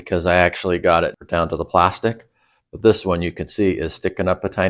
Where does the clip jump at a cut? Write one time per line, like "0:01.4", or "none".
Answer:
0:01.1

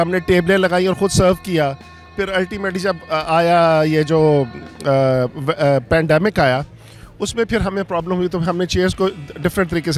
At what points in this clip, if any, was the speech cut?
none

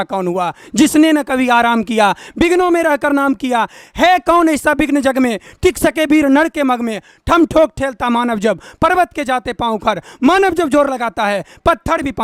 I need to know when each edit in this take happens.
none

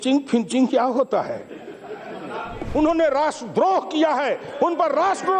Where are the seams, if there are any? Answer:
0:02.6

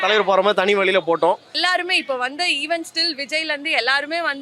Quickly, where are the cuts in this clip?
0:01.5

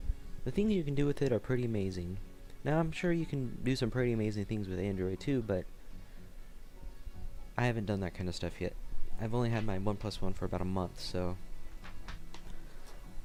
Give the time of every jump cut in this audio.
none

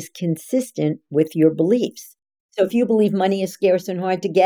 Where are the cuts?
none

